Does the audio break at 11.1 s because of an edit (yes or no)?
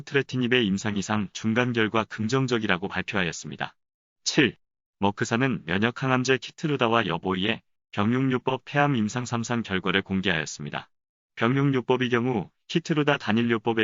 no